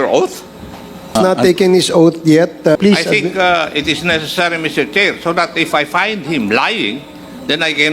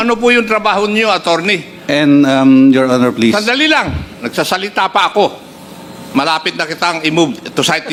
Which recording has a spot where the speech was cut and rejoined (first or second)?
first